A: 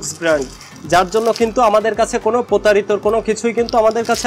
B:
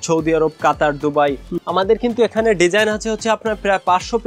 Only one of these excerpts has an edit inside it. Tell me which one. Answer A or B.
B